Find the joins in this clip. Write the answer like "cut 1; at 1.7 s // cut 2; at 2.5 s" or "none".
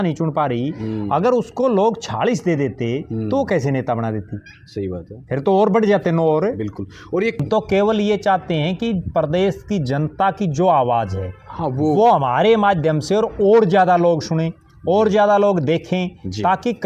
cut 1; at 7.4 s